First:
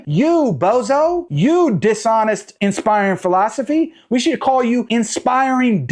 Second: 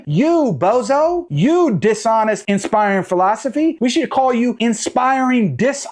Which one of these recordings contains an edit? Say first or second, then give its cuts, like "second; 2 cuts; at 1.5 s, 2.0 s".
second; 2 cuts; at 2.4 s, 3.8 s